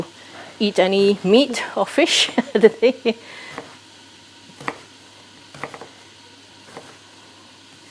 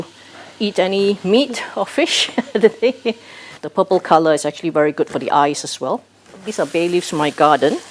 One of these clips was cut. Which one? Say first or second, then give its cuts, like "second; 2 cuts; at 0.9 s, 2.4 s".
second; 2 cuts; at 3.6 s, 6.5 s